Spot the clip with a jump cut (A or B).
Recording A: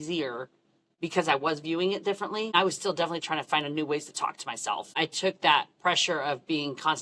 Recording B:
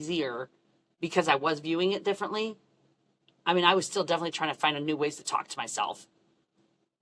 A